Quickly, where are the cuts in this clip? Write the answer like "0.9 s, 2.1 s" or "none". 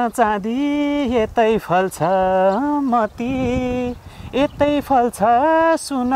none